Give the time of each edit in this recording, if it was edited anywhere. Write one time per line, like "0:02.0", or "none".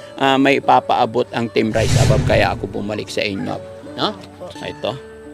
0:03.6